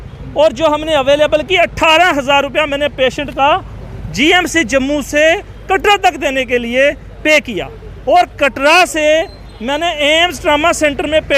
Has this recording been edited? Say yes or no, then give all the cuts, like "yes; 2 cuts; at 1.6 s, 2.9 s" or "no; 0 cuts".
no; 0 cuts